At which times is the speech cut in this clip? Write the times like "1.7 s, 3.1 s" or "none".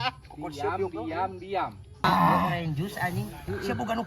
2.0 s